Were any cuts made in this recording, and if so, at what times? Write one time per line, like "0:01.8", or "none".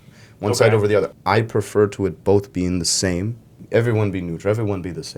0:01.1
0:03.6

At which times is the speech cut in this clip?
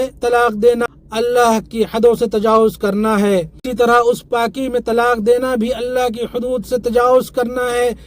0:01.0
0:03.7

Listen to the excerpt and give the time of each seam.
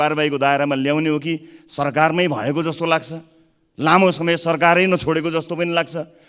none

